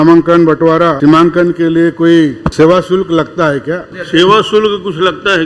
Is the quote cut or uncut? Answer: cut